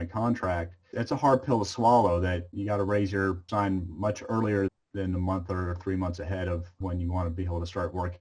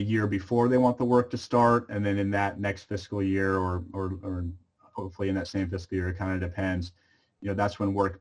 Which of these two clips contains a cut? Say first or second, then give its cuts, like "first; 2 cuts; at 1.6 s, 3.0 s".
first; 5 cuts; at 0.9 s, 2.5 s, 3.4 s, 4.7 s, 6.7 s